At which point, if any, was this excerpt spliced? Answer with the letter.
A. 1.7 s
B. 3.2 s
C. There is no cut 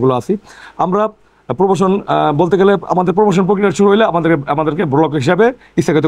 C